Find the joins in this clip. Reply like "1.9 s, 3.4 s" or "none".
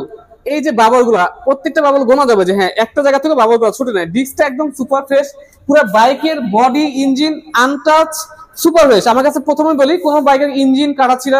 none